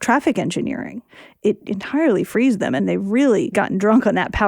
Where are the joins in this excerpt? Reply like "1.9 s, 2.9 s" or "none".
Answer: 1.5 s, 2.8 s, 3.5 s